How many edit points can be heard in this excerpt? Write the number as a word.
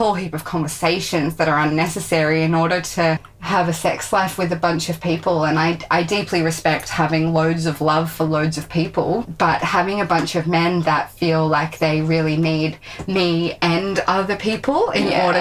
two